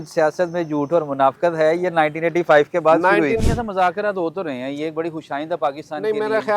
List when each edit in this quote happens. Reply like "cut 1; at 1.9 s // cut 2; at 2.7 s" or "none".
cut 1; at 3.4 s